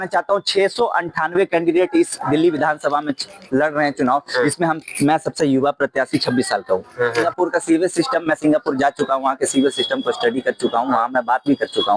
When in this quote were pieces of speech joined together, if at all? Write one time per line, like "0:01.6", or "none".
0:07.3